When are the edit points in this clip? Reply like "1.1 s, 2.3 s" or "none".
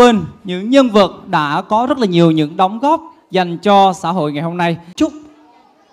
4.8 s